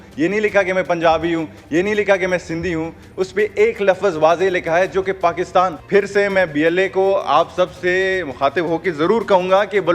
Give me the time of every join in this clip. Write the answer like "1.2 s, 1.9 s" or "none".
5.8 s